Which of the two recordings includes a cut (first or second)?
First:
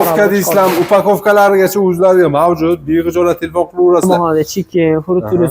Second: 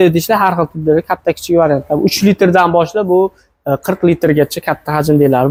first